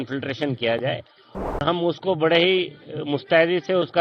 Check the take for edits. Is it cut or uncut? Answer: cut